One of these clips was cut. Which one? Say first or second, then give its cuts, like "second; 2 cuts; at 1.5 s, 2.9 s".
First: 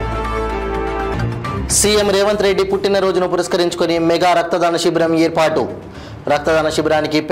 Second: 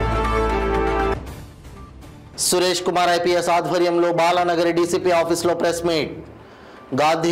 first; 1 cut; at 1.1 s